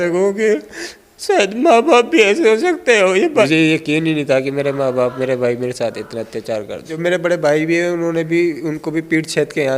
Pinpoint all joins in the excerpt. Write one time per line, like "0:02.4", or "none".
0:03.4
0:06.9